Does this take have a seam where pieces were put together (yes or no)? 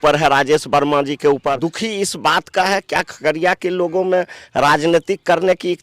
yes